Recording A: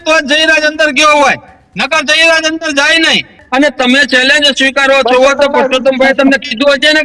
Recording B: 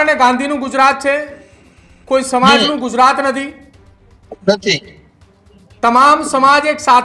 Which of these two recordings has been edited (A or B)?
A